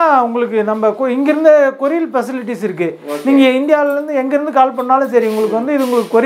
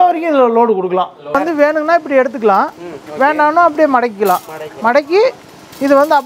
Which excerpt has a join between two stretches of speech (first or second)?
second